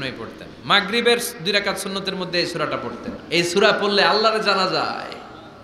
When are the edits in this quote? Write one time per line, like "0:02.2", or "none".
0:03.2